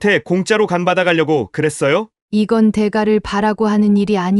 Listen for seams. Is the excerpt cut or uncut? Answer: cut